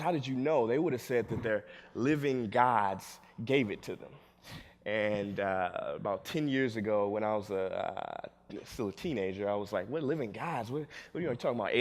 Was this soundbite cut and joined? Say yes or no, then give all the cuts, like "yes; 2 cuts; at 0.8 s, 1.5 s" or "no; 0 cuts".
yes; 1 cut; at 5.8 s